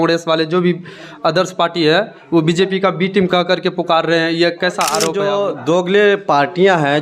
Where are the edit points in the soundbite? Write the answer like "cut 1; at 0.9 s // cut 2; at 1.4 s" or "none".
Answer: cut 1; at 5.1 s